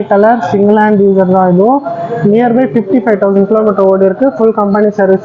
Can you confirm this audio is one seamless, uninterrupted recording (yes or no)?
yes